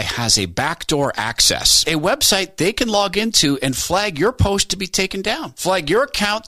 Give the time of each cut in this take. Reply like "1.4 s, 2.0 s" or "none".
none

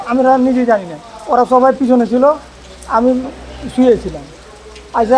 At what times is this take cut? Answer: none

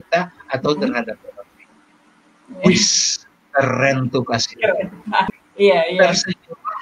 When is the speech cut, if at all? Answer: 5.3 s

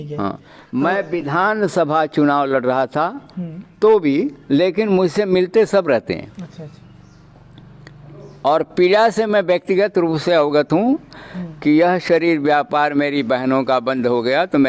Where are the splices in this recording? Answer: none

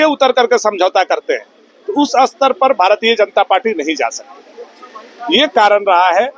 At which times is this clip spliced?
none

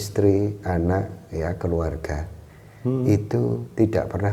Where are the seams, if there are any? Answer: none

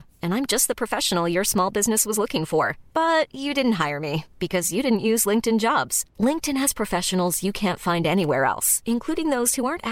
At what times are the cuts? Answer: none

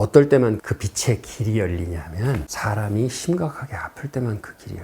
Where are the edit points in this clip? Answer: 2.5 s

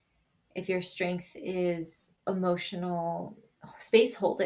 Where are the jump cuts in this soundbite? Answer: 2.1 s

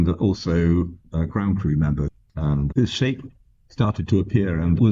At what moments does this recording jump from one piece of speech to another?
1.0 s, 2.1 s

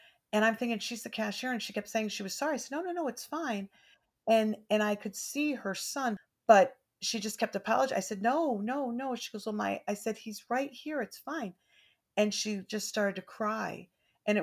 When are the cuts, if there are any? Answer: 6.1 s

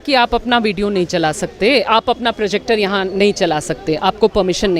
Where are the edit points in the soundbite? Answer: none

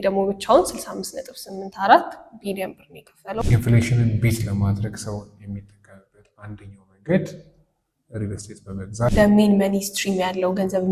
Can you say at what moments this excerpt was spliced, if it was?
3.4 s, 9.1 s

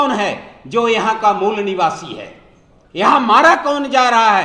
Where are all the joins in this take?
none

